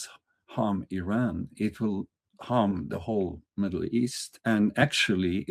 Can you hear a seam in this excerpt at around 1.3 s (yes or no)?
no